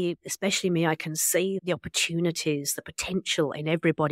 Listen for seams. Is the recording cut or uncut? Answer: cut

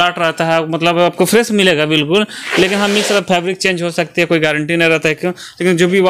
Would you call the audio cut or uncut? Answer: uncut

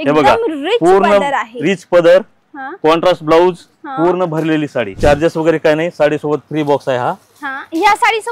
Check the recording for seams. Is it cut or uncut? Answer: cut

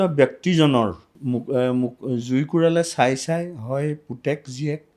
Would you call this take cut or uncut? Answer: cut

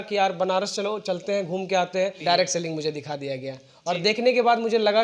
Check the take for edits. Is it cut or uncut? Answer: cut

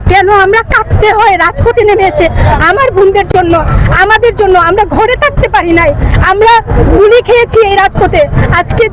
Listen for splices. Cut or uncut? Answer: uncut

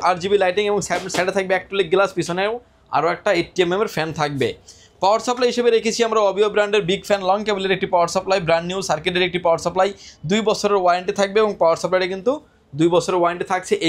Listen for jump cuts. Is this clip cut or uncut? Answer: uncut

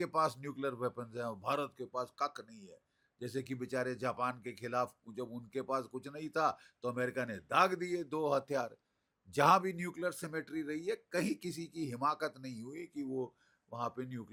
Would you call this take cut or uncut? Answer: uncut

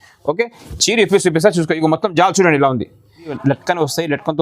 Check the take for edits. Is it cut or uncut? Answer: cut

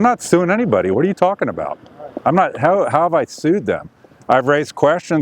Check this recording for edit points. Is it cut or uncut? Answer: uncut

